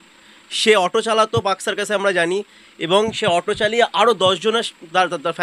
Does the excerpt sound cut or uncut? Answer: uncut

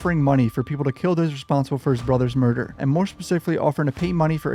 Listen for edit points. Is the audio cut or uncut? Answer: uncut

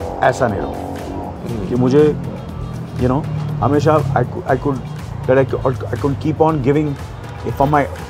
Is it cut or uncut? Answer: uncut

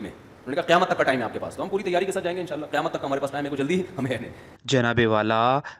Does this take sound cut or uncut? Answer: uncut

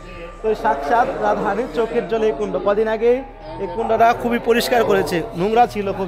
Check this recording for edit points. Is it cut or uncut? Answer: uncut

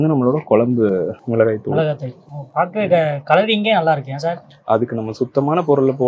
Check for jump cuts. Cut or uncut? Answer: cut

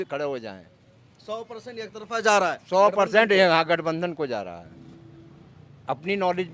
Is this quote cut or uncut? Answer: uncut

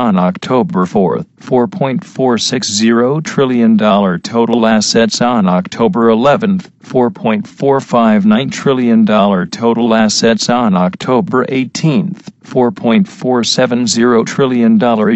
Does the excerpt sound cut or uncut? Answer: uncut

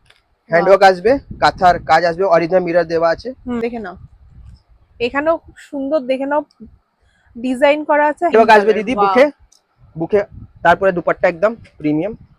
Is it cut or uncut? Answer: cut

